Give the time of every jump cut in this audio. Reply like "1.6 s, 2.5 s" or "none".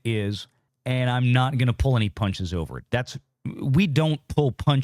none